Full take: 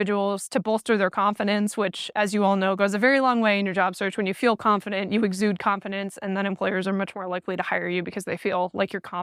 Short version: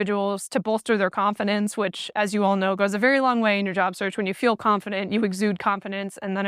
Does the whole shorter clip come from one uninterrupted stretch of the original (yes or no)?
yes